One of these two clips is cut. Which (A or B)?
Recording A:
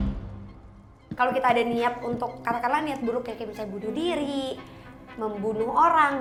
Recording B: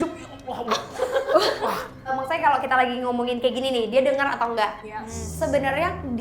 B